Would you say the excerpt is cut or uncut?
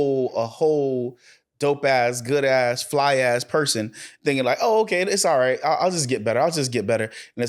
uncut